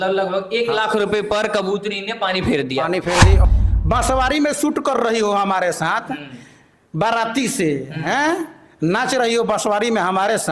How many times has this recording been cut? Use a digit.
1